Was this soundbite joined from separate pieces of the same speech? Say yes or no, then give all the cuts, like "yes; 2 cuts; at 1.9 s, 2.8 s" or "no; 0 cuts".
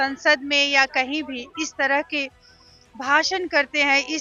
no; 0 cuts